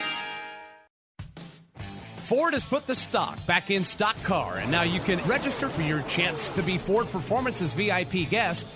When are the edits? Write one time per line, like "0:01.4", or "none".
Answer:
0:00.9